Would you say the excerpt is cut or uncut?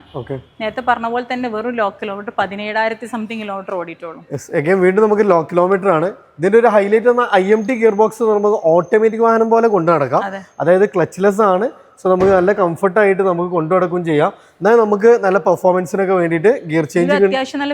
uncut